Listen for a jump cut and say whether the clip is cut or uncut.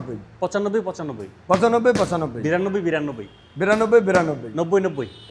uncut